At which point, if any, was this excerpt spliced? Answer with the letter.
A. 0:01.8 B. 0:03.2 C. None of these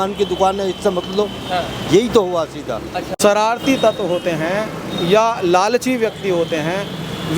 B